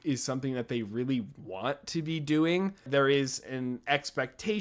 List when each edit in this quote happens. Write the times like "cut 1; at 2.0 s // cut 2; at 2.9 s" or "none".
cut 1; at 2.9 s